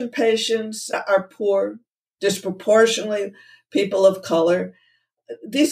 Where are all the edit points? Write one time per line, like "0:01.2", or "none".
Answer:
0:00.9